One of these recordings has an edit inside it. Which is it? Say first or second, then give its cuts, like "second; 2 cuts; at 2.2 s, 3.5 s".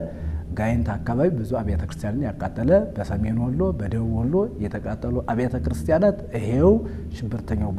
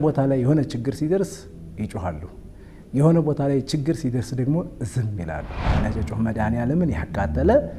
second; 1 cut; at 5.8 s